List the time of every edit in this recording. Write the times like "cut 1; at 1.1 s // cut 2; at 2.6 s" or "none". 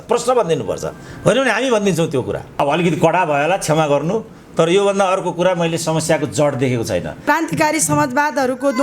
cut 1; at 2.6 s // cut 2; at 7.1 s